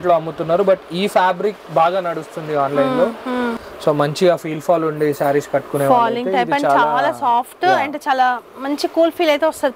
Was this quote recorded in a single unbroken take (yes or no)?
no